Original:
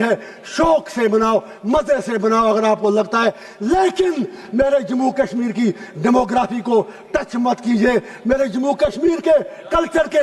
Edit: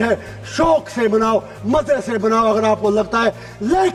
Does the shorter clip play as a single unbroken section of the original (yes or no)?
yes